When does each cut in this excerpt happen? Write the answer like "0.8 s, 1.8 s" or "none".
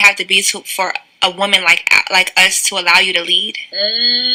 none